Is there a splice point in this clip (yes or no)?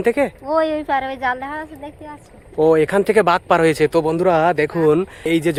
no